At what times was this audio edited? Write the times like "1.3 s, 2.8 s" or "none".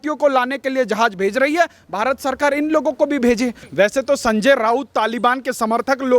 3.6 s